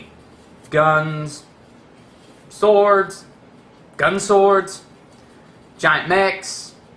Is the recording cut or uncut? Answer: cut